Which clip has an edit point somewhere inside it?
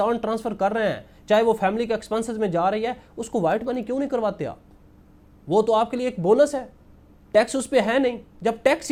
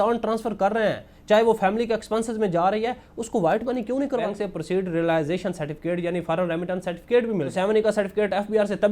second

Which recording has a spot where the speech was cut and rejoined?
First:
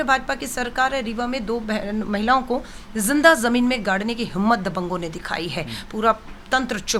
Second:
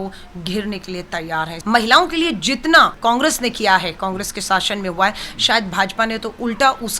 second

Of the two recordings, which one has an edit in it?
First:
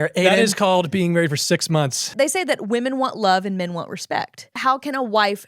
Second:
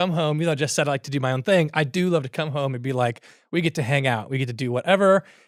first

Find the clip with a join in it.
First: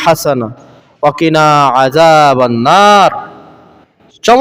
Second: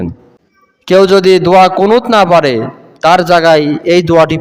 second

